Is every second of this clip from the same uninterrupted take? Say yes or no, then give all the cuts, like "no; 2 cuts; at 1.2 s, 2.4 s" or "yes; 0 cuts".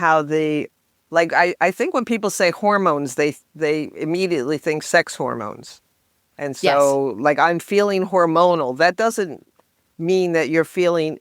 yes; 0 cuts